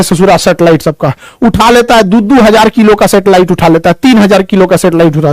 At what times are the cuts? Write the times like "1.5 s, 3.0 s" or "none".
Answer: none

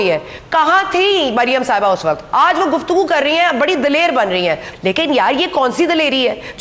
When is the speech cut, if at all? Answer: 2.2 s, 4.7 s

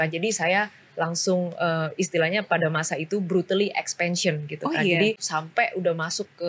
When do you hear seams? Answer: 5.2 s

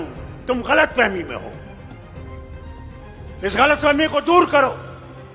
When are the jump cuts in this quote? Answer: 1.5 s, 2.9 s

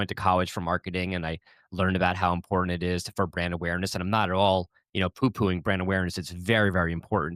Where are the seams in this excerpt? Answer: none

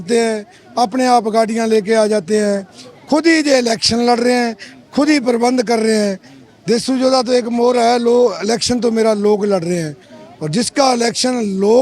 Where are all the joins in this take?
none

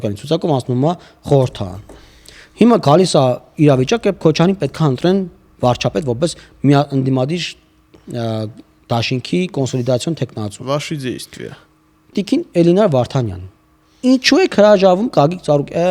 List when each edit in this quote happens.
12.1 s

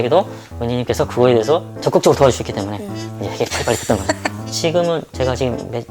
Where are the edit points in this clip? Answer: 4.4 s

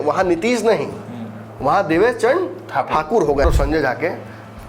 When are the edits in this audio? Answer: 3.4 s

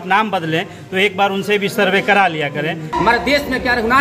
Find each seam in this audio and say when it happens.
2.9 s

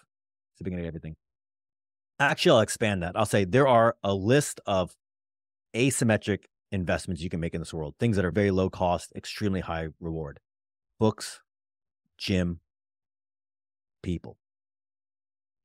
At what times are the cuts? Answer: none

